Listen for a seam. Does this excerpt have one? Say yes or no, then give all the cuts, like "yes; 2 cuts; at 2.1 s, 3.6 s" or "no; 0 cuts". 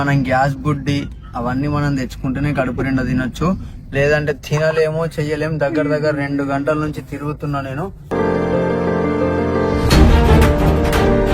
no; 0 cuts